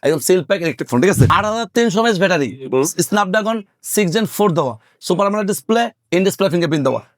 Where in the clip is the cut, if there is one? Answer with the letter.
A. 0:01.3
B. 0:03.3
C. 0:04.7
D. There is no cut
A